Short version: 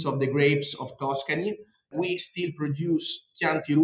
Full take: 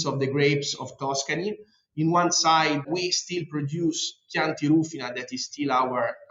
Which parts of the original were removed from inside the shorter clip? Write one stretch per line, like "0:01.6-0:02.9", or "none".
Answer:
0:01.9-0:02.8

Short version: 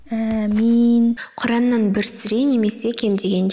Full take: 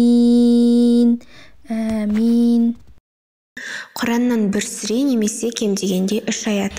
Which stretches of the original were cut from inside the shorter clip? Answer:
0:02.9-0:03.9

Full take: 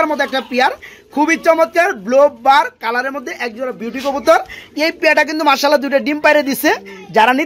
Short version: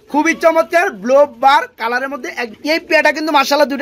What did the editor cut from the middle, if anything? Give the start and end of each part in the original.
0:03.5-0:04.6

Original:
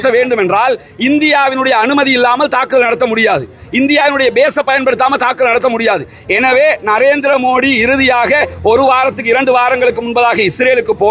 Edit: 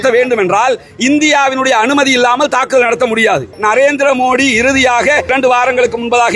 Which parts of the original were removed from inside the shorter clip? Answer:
0:03.6-0:06.8
0:08.5-0:09.3

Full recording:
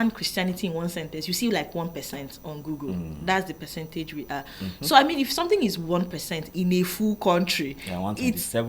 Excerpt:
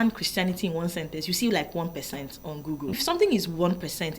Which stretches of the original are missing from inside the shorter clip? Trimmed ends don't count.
0:03.0-0:05.3

